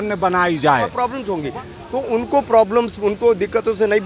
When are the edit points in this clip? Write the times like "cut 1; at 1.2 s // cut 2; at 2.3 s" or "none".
cut 1; at 1.1 s